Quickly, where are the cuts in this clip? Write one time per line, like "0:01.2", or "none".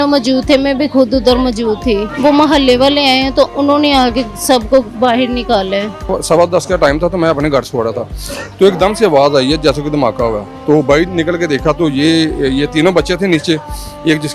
0:02.1
0:06.1